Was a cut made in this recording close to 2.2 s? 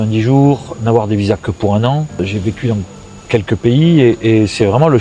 yes; 1 cut; at 2.2 s

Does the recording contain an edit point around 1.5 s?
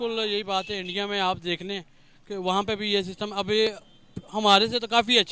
no; 0 cuts

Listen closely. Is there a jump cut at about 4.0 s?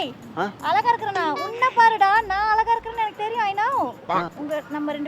yes; 1 cut; at 4.0 s

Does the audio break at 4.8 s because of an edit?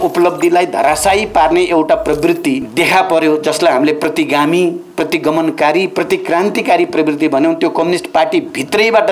no; 1 cut; at 2.7 s

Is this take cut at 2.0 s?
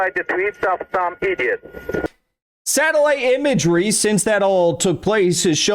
yes; 1 cut; at 2.0 s

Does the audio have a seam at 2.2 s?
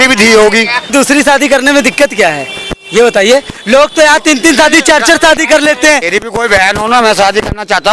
no; 2 cuts; at 0.9 s, 6.0 s

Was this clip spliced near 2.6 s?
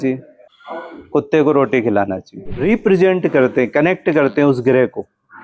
yes; 1 cut; at 2.6 s

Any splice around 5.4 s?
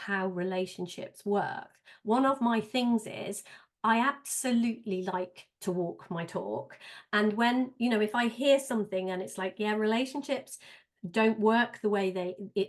no; 0 cuts

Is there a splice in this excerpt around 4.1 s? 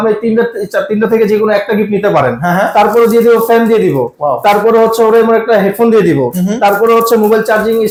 no; 0 cuts

